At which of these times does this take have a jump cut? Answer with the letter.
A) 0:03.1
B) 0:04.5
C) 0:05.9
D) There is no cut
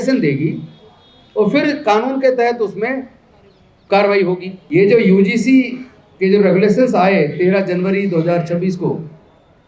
B